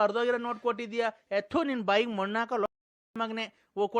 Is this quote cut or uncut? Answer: uncut